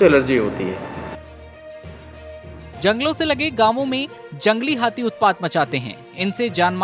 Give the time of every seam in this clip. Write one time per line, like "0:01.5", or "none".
none